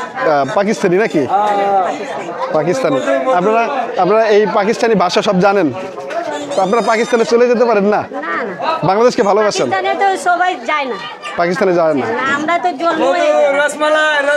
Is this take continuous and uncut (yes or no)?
yes